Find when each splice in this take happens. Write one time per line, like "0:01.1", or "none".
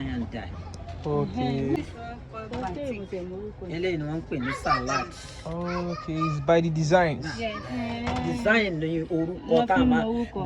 0:01.8